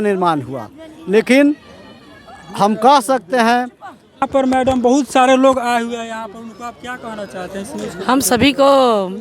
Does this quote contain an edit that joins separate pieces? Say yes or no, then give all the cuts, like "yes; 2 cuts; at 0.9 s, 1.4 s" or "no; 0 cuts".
yes; 1 cut; at 4.3 s